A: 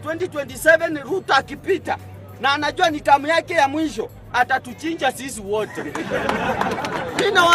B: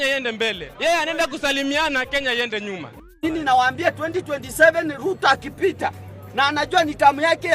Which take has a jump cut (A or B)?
B